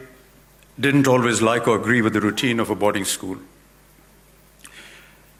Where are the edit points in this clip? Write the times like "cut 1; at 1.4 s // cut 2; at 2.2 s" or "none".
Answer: none